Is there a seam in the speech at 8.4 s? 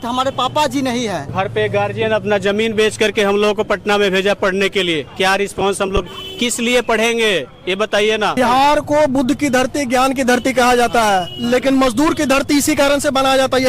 yes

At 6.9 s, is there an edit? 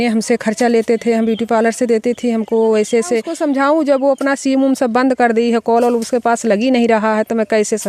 no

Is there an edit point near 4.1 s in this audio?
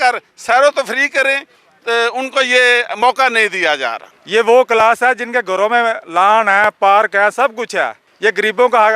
yes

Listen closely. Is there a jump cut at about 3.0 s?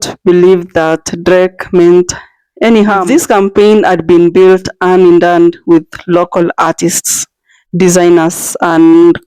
yes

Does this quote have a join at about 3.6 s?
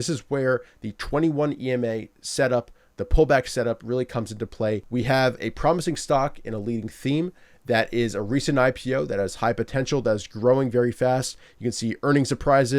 no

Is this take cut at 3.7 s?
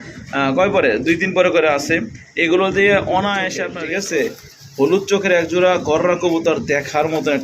yes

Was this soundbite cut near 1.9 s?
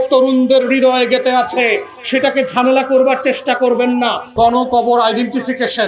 no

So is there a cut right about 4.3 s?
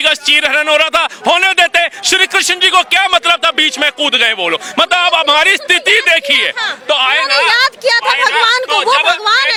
no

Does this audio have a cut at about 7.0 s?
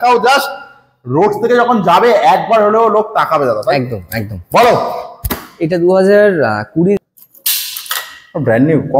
yes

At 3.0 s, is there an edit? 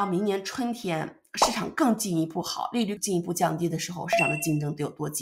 yes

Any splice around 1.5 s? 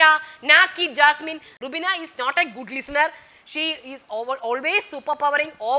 yes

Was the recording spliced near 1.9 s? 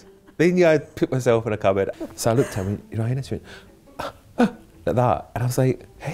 yes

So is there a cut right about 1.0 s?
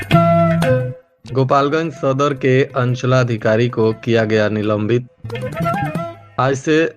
yes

